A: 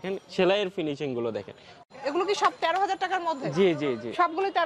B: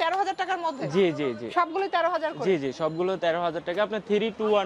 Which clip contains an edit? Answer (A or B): A